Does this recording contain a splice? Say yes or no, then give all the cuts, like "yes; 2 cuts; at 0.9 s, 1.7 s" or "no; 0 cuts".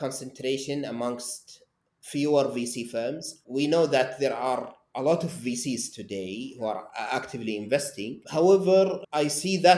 no; 0 cuts